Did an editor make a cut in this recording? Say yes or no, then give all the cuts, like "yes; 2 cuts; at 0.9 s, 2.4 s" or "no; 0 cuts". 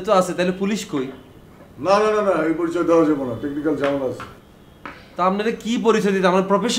no; 0 cuts